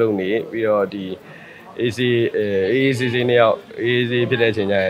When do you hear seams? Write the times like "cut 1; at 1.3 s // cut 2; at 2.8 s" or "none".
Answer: none